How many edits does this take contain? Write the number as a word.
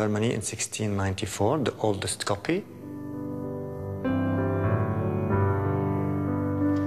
zero